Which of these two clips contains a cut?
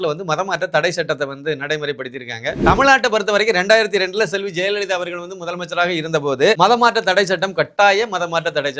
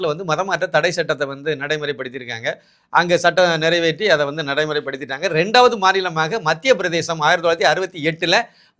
first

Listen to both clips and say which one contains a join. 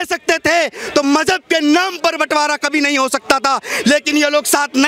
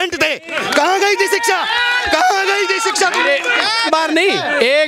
second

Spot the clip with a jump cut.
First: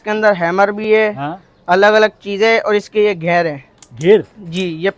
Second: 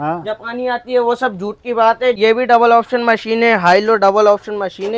second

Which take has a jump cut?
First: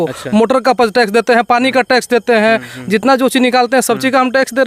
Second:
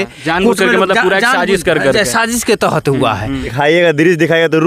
second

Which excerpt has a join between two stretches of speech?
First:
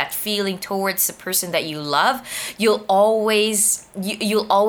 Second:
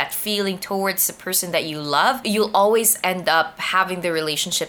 second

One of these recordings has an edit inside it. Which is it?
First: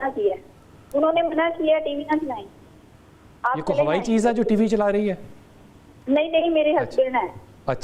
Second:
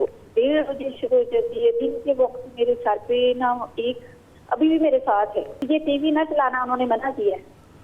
second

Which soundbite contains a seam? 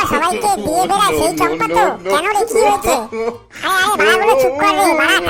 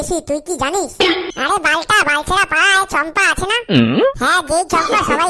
second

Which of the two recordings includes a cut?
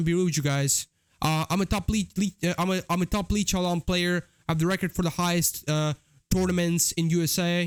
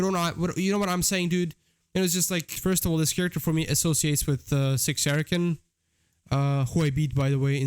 second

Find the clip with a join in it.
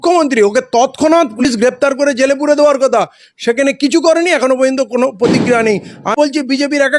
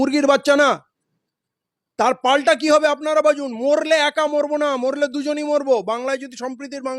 first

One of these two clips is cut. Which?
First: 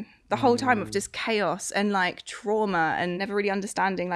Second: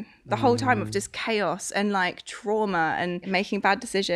first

